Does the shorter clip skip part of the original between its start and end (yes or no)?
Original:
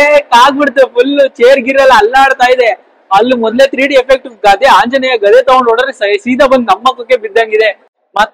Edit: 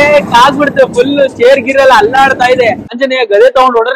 yes